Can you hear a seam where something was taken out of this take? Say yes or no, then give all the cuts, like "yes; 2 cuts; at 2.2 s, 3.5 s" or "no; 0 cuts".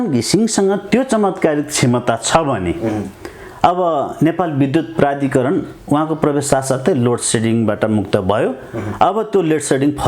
no; 0 cuts